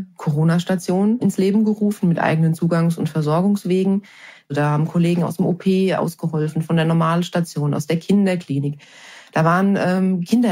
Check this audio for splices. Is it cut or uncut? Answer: cut